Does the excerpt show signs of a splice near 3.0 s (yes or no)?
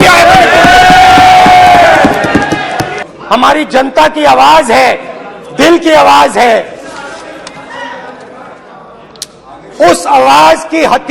yes